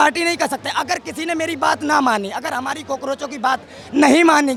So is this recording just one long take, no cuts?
yes; 0 cuts

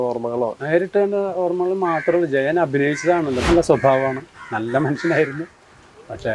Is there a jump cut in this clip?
yes; 1 cut; at 3.4 s

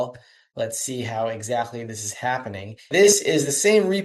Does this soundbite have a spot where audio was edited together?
yes; 1 cut; at 3.0 s

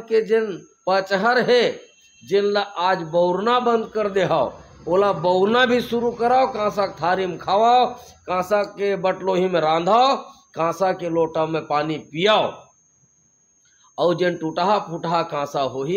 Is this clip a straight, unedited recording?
yes; 0 cuts

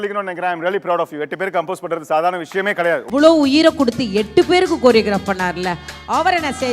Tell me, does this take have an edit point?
yes; 1 cut; at 3.0 s

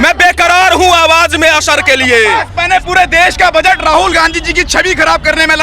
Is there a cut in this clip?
yes; 1 cut; at 2.5 s

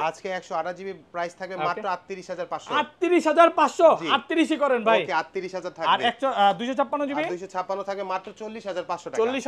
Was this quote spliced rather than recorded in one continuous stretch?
no; 0 cuts

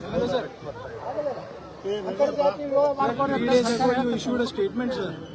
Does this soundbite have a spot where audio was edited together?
no; 0 cuts

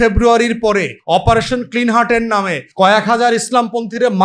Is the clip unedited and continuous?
no; 2 cuts; at 0.9 s, 2.6 s

